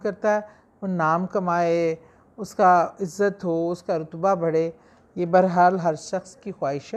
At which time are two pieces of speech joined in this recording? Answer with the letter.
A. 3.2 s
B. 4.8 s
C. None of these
C